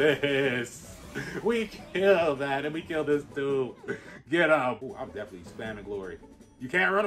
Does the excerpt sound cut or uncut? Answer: cut